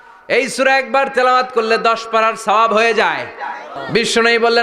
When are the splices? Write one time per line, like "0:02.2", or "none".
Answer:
0:03.7